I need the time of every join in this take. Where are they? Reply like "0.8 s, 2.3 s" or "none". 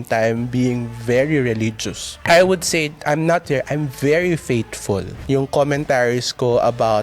2.1 s, 5.2 s